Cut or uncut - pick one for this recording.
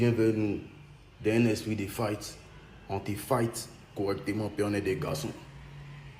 cut